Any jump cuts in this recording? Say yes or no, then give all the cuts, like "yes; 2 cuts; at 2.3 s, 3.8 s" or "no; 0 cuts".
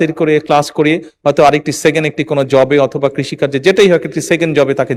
no; 0 cuts